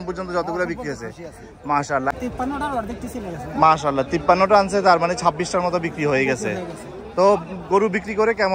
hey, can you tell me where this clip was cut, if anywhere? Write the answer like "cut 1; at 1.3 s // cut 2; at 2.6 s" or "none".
cut 1; at 2.1 s